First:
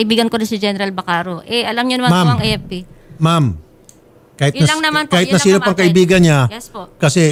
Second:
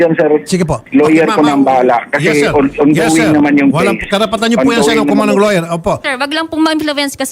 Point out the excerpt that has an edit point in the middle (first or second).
second